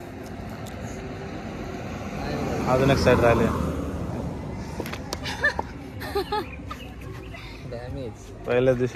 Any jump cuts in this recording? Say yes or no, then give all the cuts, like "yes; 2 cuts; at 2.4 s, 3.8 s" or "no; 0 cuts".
no; 0 cuts